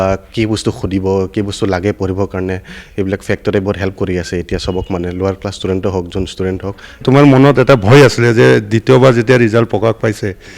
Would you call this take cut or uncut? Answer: cut